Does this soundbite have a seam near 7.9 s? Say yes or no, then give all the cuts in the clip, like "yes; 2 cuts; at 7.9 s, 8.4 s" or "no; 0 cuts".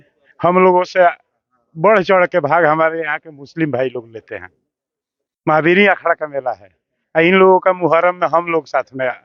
no; 0 cuts